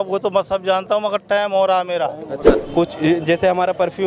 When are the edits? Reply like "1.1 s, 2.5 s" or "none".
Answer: 2.4 s

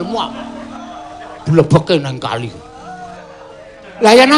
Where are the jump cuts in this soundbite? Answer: 1.8 s

